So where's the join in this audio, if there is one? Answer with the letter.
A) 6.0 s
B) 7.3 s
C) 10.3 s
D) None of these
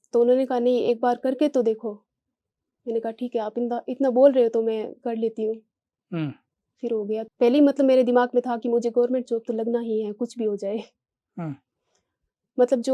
B